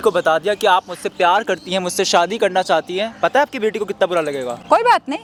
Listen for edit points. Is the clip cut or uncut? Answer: uncut